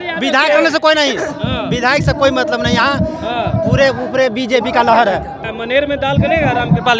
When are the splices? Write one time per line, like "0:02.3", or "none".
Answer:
0:05.4